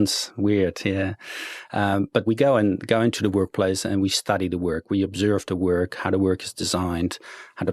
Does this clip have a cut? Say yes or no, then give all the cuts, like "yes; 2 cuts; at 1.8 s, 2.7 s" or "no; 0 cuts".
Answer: no; 0 cuts